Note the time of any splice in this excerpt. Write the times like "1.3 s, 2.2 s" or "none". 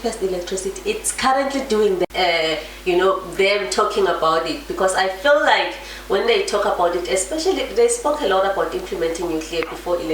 2.1 s